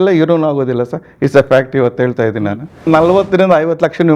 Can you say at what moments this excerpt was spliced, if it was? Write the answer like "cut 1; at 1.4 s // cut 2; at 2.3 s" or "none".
cut 1; at 2.8 s